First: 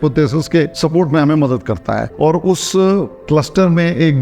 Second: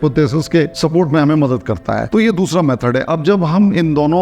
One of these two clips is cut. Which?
first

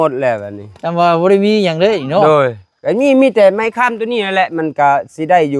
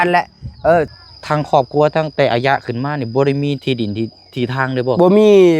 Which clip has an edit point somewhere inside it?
second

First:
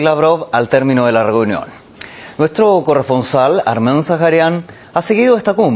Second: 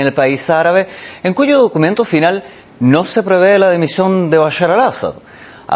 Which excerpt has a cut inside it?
second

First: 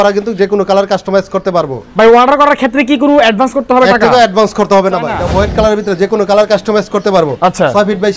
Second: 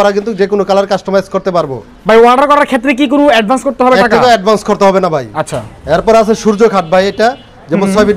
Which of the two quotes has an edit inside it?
first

